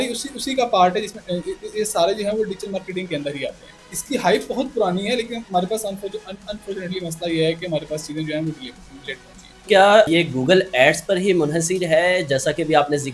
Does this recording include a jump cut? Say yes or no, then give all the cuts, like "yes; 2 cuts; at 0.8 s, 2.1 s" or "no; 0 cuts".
no; 0 cuts